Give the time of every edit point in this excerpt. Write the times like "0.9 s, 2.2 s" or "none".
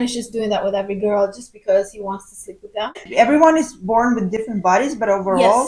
3.0 s